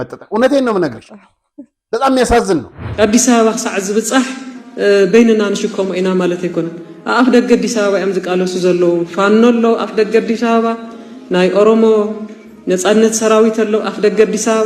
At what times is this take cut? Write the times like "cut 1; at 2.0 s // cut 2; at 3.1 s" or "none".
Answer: cut 1; at 2.8 s // cut 2; at 9.9 s